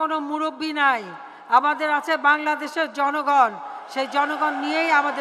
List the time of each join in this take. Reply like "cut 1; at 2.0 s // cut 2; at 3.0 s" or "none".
none